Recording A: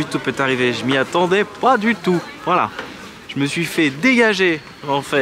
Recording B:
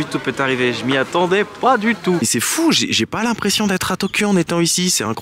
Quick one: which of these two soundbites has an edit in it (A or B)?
B